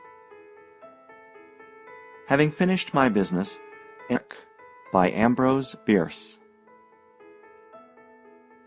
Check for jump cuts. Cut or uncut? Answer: uncut